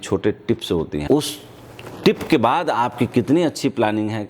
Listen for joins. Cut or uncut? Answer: cut